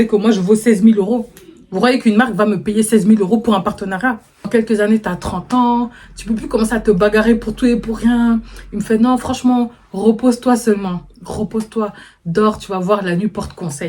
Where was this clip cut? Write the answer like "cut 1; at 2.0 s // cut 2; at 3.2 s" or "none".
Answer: cut 1; at 4.5 s

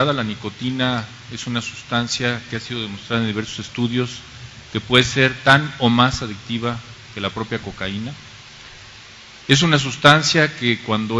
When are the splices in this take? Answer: none

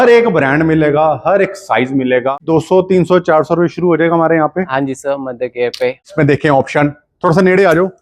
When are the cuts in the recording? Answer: cut 1; at 2.4 s // cut 2; at 6.1 s

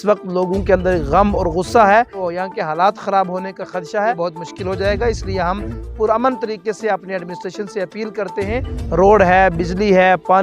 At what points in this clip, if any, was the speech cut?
cut 1; at 2.2 s // cut 2; at 4.2 s // cut 3; at 8.8 s

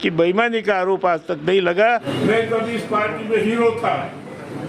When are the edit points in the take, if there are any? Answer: cut 1; at 1.9 s

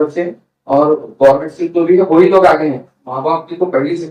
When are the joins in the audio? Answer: cut 1; at 2.8 s

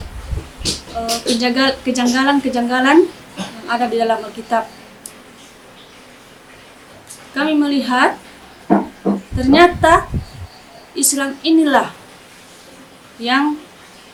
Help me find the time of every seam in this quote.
none

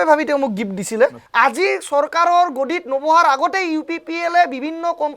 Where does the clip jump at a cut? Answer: cut 1; at 1.2 s

